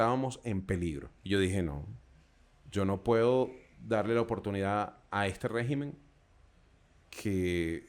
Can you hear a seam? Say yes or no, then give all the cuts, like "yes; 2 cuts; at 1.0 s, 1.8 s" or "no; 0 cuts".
yes; 1 cut; at 1.1 s